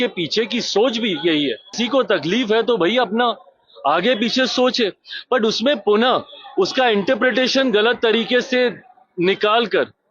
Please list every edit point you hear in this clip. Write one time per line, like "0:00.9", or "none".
0:01.8